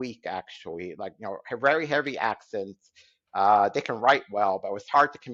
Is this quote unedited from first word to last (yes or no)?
yes